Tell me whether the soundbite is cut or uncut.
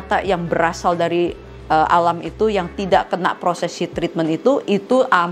uncut